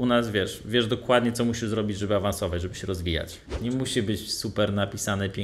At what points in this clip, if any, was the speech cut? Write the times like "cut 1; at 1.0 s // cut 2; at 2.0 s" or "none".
cut 1; at 3.4 s

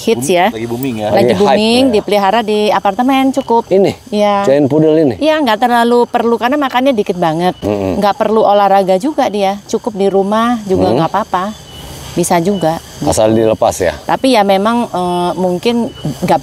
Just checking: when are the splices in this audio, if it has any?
none

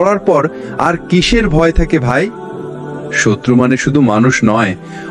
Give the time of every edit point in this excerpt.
none

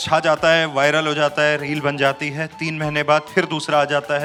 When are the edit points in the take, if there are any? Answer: none

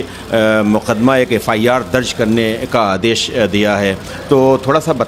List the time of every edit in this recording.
none

